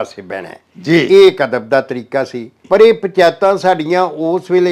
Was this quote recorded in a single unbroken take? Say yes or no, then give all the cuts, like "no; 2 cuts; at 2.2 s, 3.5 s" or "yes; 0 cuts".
yes; 0 cuts